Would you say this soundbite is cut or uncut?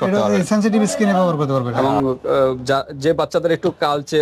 cut